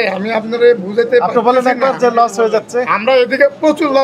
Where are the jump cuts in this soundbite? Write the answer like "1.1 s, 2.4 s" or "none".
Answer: none